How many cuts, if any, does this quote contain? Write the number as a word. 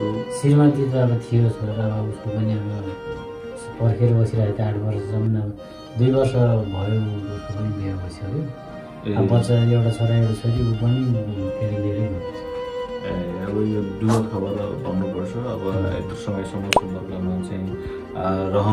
zero